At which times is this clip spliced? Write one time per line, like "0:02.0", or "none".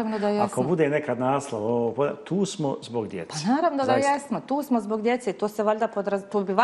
none

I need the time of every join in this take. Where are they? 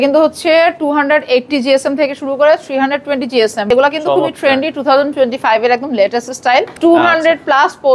0:03.6
0:06.7

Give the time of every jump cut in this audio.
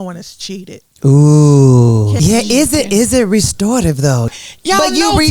0:02.1
0:04.3

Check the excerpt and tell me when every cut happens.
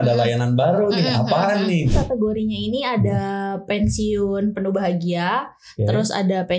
0:01.9

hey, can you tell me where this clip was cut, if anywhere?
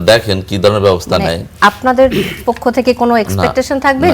none

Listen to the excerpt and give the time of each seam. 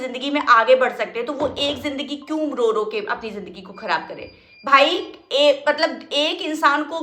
none

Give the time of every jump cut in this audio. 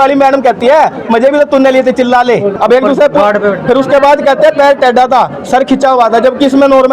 0:02.5

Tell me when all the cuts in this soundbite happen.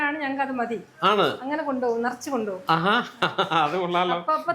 none

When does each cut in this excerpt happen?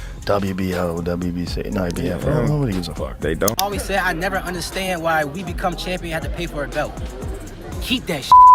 0:03.6

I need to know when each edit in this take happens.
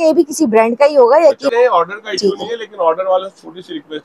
0:01.5

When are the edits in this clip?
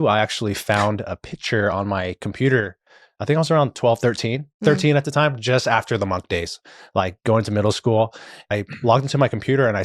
0:08.4

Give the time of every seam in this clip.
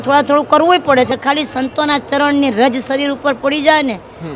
0:01.1

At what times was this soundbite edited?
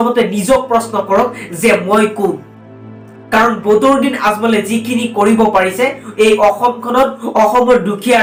none

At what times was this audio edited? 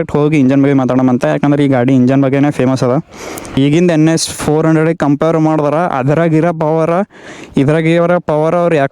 0:03.5

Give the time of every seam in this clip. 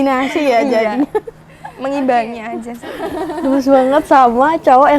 0:03.0

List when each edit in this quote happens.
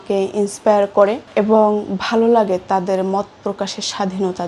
0:01.2

